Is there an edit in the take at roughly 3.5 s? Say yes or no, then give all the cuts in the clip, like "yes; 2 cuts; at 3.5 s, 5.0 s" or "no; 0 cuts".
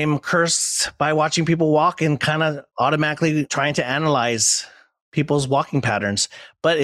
yes; 2 cuts; at 2.6 s, 3.5 s